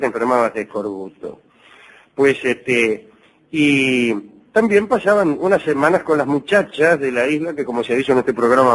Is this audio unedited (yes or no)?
yes